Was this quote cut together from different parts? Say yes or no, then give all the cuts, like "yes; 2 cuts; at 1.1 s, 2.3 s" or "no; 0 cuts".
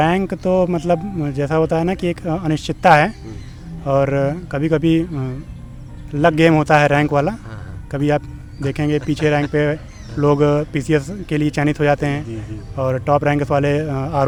no; 0 cuts